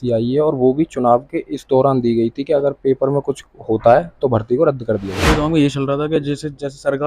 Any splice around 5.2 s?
yes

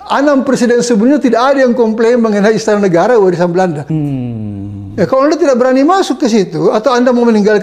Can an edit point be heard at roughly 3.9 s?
yes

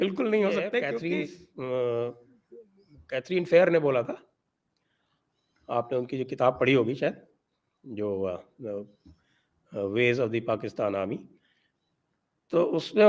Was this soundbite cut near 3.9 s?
no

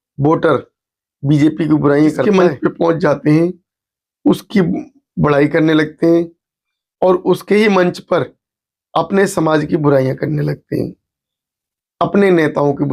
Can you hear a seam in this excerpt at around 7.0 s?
no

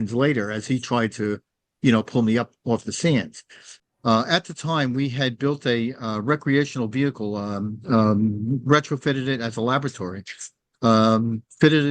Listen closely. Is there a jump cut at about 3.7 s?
yes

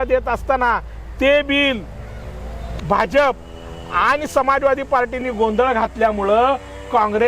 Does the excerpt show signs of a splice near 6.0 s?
no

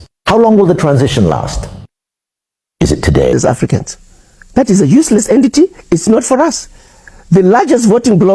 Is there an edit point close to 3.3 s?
yes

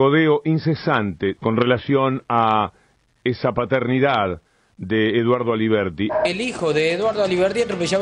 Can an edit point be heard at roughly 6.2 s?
yes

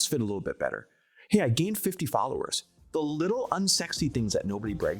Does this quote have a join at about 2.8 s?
yes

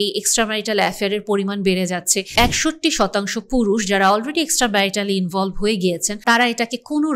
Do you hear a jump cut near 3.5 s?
no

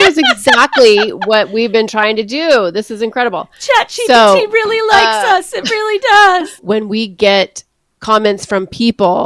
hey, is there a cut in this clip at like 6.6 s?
yes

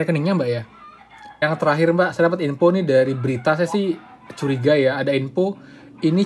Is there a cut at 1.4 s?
yes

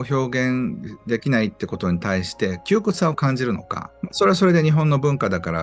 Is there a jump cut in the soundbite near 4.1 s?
yes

